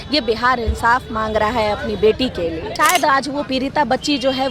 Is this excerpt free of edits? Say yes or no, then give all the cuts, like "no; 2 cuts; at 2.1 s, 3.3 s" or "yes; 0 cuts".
no; 1 cut; at 2.7 s